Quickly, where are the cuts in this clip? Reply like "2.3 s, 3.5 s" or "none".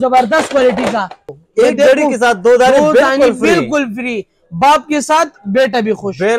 1.2 s